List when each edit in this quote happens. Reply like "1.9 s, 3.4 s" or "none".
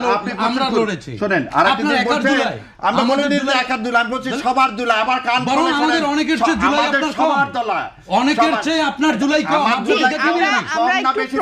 none